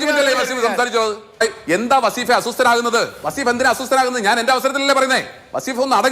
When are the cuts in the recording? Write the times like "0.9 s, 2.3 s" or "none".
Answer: 1.4 s